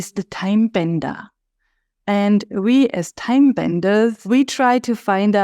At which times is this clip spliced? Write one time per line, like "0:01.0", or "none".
0:04.2